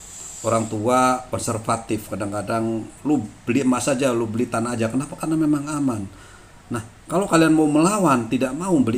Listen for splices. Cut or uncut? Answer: uncut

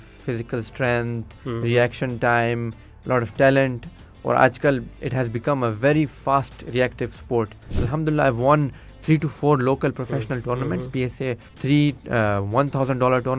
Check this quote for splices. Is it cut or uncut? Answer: cut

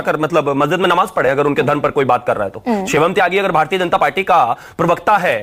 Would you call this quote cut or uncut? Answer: uncut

